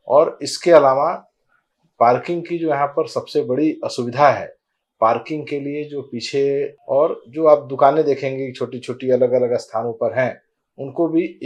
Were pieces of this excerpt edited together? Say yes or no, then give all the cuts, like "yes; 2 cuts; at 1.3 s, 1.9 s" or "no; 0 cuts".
yes; 1 cut; at 6.8 s